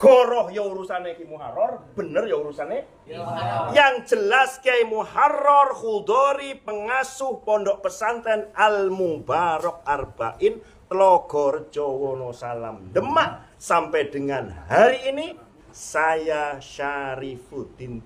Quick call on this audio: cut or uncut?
cut